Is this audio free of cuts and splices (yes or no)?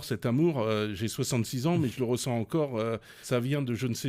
no